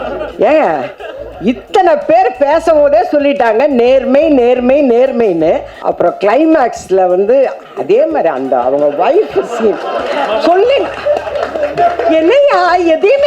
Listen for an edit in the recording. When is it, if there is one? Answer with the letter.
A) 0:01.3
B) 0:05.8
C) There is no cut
B